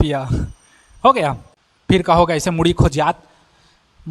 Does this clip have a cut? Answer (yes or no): yes